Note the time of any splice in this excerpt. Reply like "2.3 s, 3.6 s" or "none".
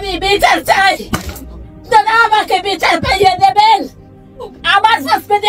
none